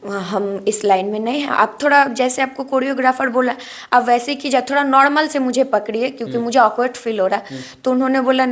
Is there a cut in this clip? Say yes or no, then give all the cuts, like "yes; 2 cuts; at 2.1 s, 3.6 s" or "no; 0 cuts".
no; 0 cuts